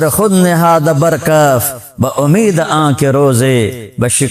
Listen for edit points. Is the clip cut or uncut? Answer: uncut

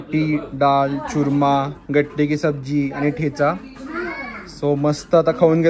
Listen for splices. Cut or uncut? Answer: uncut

